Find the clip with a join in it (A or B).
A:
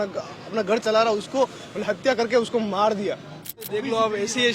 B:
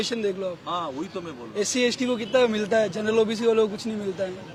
A